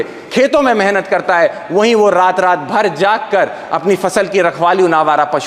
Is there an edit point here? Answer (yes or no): no